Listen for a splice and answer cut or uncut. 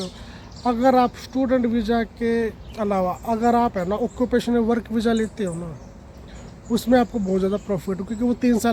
uncut